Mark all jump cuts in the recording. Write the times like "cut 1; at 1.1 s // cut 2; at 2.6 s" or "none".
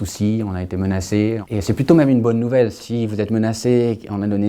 cut 1; at 1.3 s